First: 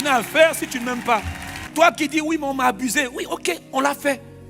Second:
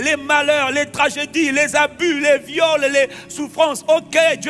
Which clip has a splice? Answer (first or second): first